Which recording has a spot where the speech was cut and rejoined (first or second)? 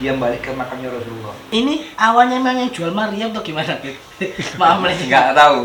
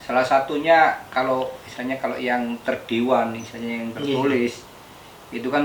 first